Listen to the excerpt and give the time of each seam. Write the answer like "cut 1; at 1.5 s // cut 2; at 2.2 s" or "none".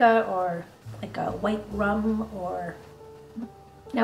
none